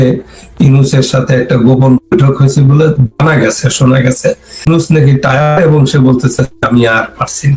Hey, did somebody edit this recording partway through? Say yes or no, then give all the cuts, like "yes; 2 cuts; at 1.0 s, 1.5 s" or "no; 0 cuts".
yes; 1 cut; at 4.7 s